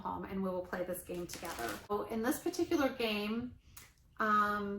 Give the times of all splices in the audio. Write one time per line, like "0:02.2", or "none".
0:01.9